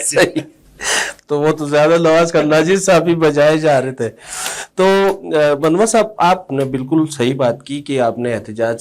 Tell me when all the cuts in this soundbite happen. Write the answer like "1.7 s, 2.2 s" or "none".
none